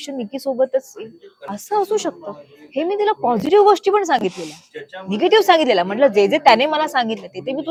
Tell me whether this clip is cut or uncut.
uncut